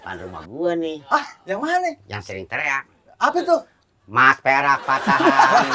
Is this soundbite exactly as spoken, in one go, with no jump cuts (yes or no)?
yes